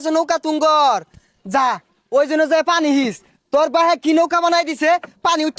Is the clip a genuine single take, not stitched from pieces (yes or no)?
yes